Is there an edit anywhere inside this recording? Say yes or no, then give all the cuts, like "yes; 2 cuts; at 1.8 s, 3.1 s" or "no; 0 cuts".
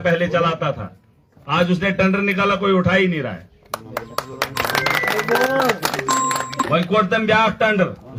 no; 0 cuts